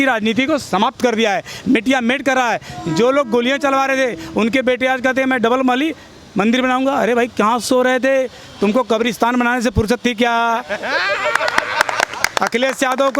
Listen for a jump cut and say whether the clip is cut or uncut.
uncut